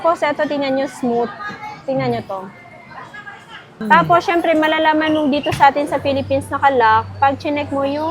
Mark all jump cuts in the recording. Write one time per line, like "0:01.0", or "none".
0:03.7